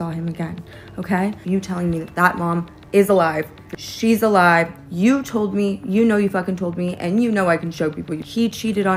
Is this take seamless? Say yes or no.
yes